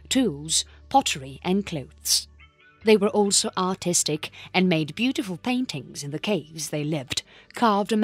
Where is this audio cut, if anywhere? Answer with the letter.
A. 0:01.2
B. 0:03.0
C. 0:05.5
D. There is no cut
A